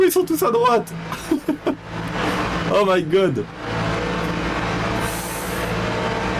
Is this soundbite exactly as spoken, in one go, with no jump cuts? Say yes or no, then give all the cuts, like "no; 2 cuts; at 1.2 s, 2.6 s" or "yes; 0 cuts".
yes; 0 cuts